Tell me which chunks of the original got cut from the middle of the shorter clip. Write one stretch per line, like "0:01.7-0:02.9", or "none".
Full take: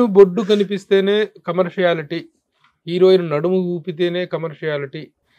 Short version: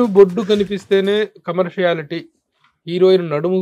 none

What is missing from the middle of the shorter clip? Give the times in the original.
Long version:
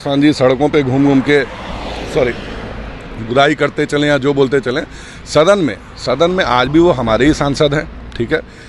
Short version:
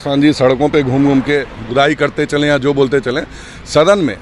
0:01.6-0:03.2

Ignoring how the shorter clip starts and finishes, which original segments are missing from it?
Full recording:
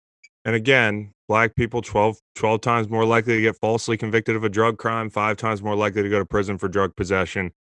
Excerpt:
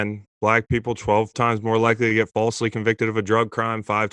0:02.2-0:02.6

